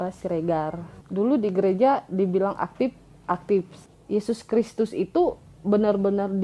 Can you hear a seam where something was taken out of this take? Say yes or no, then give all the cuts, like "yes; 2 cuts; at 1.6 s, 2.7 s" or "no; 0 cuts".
yes; 1 cut; at 3.8 s